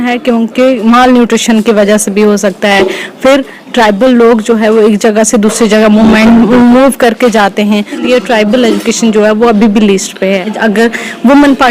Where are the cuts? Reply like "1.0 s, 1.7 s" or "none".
8.0 s, 10.6 s